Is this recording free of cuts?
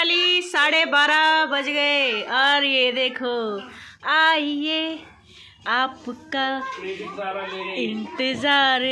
yes; 0 cuts

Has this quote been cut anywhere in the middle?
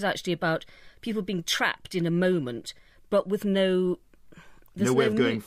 no; 0 cuts

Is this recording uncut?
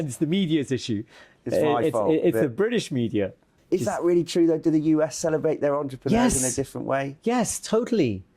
no; 1 cut; at 3.5 s

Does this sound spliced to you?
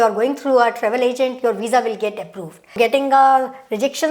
yes; 1 cut; at 2.8 s

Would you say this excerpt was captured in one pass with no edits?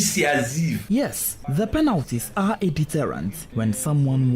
no; 2 cuts; at 0.9 s, 3.4 s

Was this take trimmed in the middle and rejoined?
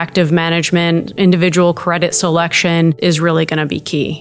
yes; 1 cut; at 3.0 s

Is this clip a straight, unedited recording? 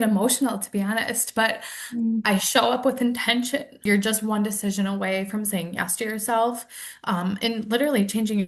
no; 1 cut; at 3.8 s

